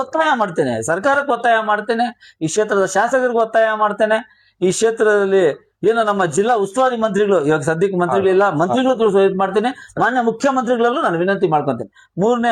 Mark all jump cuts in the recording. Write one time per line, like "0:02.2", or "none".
none